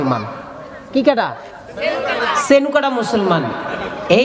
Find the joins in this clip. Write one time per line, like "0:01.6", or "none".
none